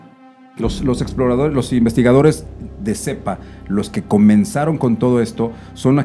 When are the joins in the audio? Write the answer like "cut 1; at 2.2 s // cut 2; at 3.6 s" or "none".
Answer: none